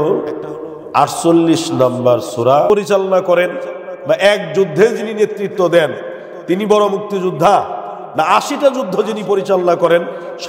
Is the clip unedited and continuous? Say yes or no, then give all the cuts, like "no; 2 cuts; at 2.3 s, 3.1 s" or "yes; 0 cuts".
no; 1 cut; at 2.7 s